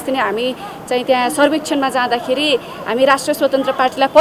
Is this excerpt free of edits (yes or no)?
yes